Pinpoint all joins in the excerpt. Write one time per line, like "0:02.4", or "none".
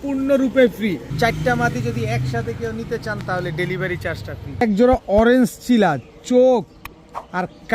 0:01.1
0:04.6